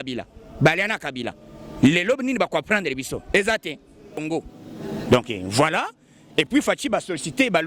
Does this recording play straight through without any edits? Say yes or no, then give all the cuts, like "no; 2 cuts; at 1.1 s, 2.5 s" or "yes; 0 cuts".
no; 1 cut; at 4.1 s